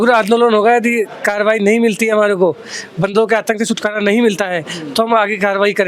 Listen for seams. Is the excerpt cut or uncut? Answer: uncut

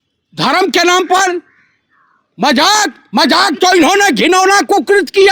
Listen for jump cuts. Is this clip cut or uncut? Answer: uncut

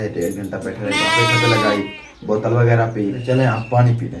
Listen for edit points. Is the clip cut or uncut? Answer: cut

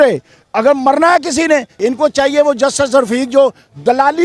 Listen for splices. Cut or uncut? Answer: cut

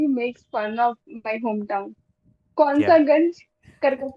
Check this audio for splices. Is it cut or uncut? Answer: uncut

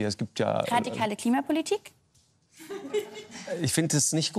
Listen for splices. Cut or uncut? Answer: uncut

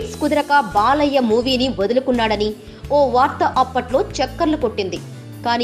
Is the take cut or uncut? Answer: uncut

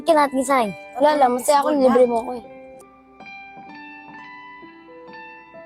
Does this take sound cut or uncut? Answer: cut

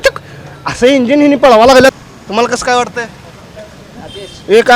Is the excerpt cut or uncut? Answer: cut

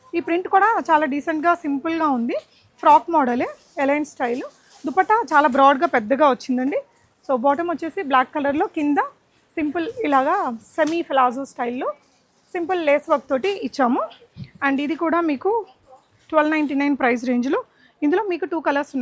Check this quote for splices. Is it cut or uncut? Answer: uncut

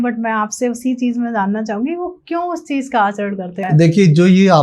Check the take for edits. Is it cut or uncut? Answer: cut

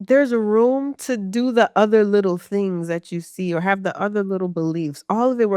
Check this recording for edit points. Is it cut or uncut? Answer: uncut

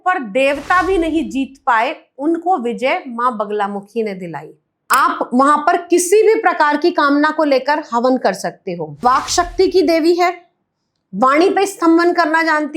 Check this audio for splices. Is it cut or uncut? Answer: cut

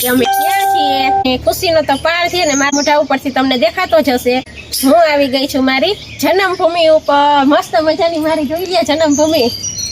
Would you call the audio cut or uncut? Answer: cut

